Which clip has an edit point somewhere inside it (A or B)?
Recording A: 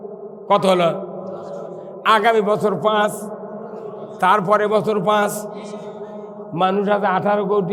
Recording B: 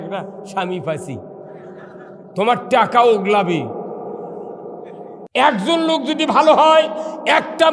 B